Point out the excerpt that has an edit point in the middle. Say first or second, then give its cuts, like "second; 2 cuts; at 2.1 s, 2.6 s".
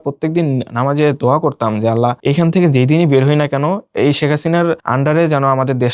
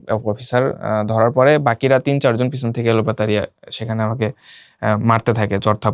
first; 3 cuts; at 2.2 s, 3.8 s, 4.8 s